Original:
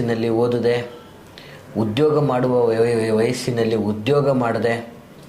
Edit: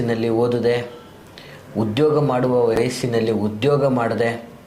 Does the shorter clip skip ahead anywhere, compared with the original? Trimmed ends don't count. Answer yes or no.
yes